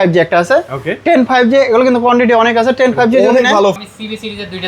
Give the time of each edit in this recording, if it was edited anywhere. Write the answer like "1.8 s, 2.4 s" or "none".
3.8 s